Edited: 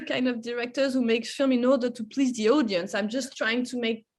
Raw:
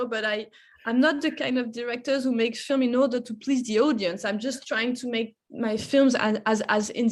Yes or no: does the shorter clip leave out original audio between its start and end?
no